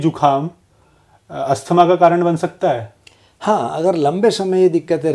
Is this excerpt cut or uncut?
uncut